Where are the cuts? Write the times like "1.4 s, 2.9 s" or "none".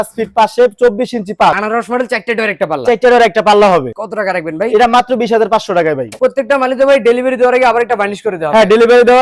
none